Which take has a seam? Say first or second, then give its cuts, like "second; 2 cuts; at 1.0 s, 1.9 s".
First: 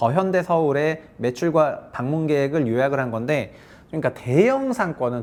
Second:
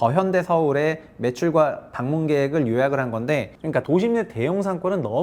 second; 1 cut; at 3.8 s